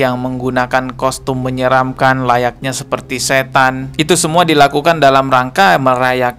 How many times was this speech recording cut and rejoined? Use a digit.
0